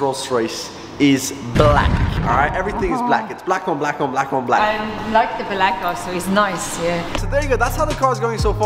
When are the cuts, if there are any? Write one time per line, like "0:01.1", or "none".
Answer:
none